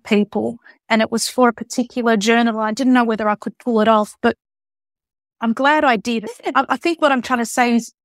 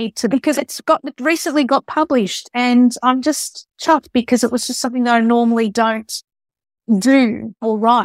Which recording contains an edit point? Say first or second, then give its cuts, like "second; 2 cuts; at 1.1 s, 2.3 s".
first; 1 cut; at 6.3 s